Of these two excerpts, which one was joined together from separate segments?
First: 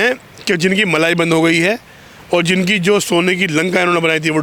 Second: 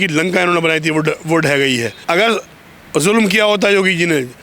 second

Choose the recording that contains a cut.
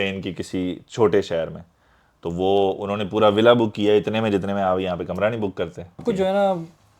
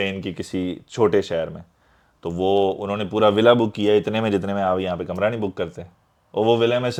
first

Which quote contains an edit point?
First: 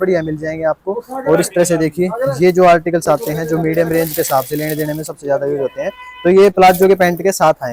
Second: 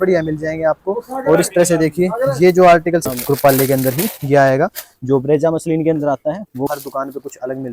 second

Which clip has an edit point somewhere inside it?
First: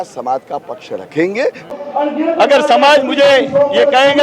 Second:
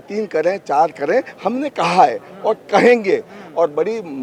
first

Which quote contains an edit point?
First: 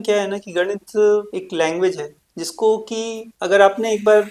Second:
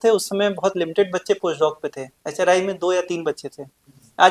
first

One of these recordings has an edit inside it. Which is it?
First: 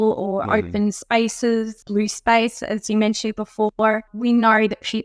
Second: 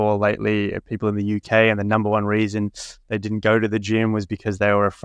first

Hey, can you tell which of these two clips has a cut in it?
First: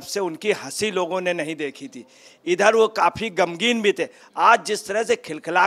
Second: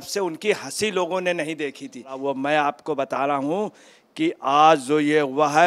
second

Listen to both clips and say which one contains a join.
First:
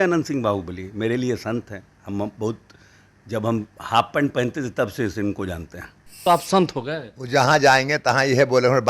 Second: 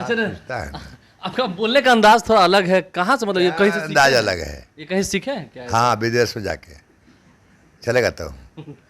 first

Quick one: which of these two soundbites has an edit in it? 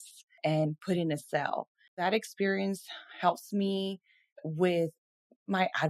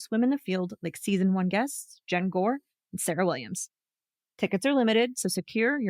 first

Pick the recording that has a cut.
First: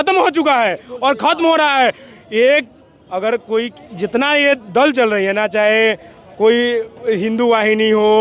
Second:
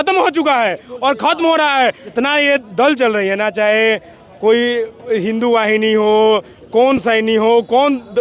second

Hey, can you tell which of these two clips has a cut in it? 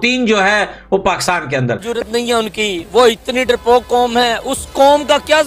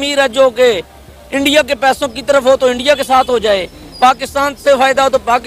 first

